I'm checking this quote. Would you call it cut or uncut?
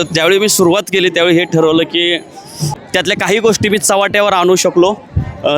cut